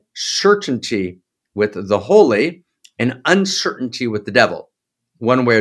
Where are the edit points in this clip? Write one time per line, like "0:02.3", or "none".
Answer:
none